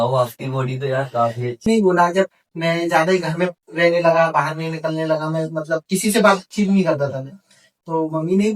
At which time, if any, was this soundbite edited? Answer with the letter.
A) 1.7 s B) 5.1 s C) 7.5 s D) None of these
A